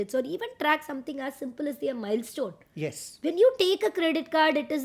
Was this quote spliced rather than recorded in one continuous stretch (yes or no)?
no